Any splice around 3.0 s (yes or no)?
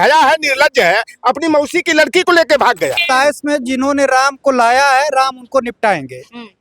yes